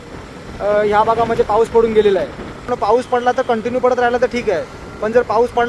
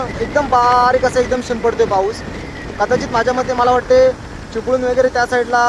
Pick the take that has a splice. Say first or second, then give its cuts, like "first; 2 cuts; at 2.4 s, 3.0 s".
first; 1 cut; at 2.7 s